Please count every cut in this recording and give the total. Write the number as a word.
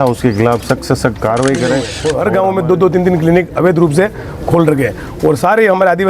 one